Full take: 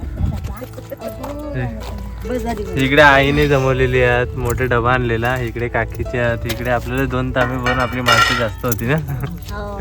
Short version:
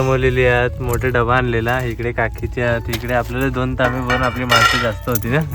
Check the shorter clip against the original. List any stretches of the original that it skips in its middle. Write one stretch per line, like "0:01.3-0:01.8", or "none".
none